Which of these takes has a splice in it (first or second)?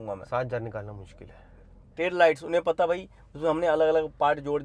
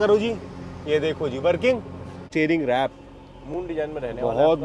second